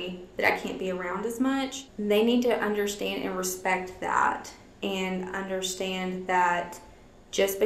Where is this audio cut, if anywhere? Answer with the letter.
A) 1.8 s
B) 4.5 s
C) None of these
A